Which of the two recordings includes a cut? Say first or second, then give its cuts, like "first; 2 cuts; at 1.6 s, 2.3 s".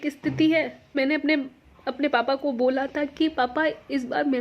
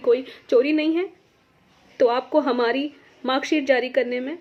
first; 1 cut; at 1.0 s